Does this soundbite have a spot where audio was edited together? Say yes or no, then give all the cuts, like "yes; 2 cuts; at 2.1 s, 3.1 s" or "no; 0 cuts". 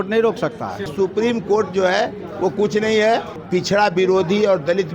yes; 2 cuts; at 0.9 s, 3.3 s